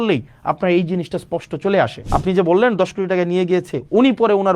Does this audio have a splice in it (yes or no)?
yes